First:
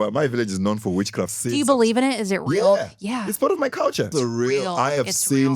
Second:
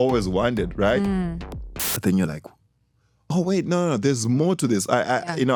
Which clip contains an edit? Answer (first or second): first